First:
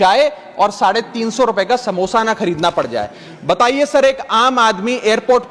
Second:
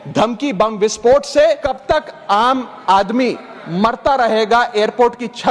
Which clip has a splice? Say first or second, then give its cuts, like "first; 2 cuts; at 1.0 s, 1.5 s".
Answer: second; 1 cut; at 1.7 s